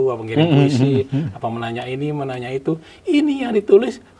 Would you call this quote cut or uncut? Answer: uncut